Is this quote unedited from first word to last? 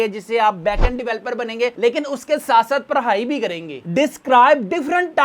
no; 1 cut; at 3.8 s

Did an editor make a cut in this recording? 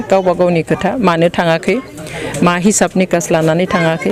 no; 0 cuts

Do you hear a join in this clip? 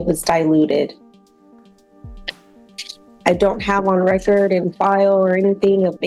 no; 0 cuts

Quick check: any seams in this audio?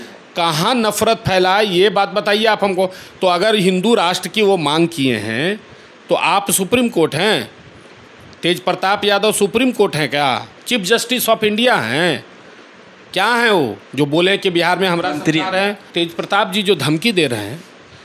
yes; 1 cut; at 15.8 s

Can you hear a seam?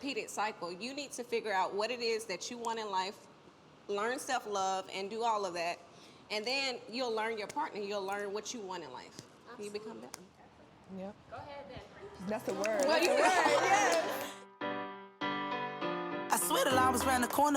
yes; 1 cut; at 14.2 s

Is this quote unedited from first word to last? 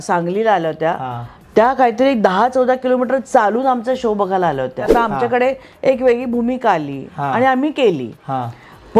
no; 1 cut; at 4.9 s

